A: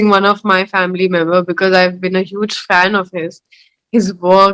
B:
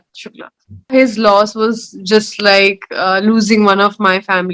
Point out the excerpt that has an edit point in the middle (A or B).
B